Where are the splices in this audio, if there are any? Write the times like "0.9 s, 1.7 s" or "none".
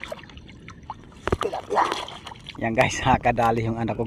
2.4 s